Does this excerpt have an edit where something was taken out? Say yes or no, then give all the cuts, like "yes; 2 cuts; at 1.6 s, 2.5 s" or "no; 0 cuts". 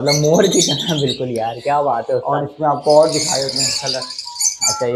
no; 0 cuts